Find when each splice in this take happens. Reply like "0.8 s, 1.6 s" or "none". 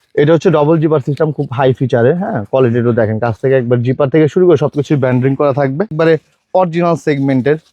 5.9 s